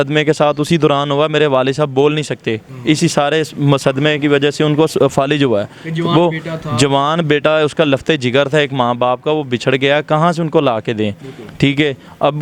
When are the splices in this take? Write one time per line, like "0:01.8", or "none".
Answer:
0:02.7